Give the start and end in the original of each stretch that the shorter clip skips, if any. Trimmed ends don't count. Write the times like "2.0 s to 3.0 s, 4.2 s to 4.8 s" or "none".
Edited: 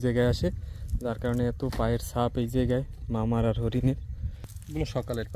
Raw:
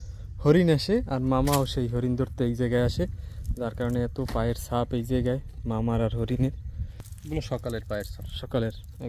none

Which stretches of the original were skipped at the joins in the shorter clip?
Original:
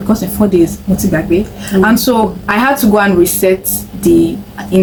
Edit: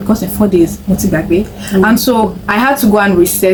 none

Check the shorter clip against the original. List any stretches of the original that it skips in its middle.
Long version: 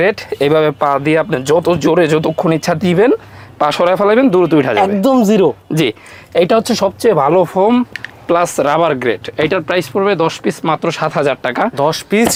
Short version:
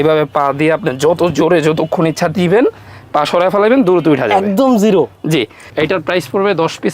6.1 s to 9.3 s

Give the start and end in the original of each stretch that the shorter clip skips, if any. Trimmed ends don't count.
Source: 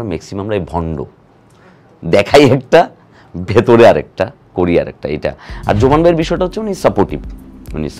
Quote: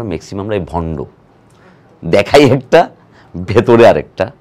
none

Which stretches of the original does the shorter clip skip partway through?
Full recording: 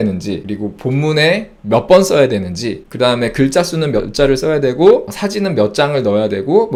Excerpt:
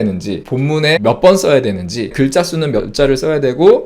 0.8 s to 1.5 s, 2.8 s to 3.3 s

